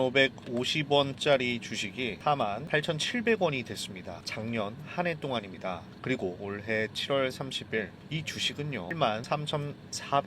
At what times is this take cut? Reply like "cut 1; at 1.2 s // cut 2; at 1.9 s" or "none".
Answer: cut 1; at 8.9 s